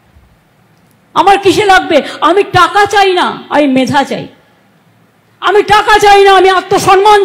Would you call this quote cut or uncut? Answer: uncut